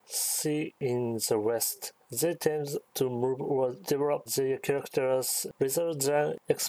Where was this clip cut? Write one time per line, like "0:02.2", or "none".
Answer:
0:00.8
0:01.8
0:02.8
0:04.0